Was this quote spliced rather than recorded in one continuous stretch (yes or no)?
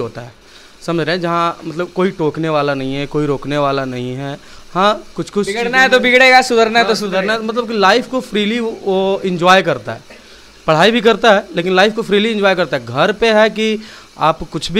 no